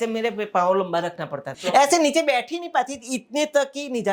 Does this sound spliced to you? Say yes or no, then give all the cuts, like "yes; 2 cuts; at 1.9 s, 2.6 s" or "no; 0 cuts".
yes; 1 cut; at 1.5 s